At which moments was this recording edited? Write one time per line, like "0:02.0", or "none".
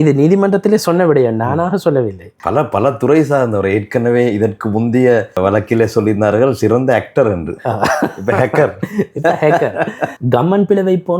0:02.2
0:10.1